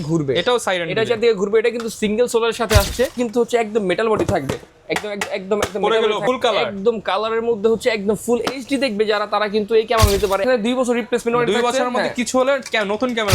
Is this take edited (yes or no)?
yes